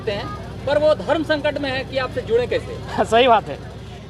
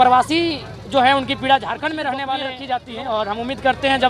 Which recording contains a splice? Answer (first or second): second